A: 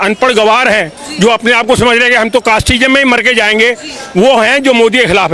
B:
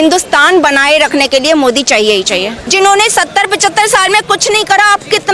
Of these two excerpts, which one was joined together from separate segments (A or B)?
B